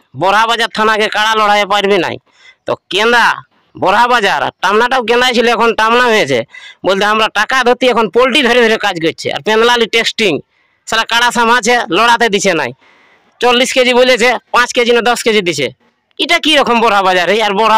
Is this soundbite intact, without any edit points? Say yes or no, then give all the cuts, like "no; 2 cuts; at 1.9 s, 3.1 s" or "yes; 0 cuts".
yes; 0 cuts